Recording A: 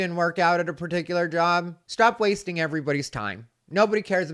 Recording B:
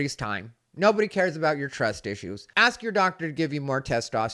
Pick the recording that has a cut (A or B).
B